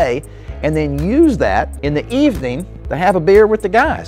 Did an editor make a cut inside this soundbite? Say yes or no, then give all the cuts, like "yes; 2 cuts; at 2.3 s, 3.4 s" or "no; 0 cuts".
yes; 1 cut; at 1.8 s